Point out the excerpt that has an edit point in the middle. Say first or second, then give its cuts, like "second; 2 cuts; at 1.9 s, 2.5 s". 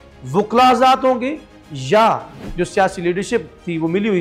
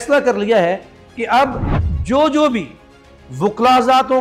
first; 1 cut; at 2.4 s